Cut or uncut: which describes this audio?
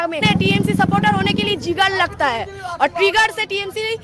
uncut